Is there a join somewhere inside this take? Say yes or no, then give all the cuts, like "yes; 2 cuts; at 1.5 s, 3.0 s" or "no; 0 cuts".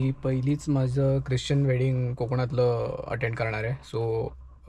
no; 0 cuts